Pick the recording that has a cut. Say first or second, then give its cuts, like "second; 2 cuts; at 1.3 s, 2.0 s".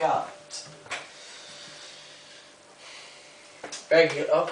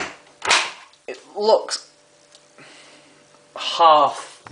first; 1 cut; at 3.5 s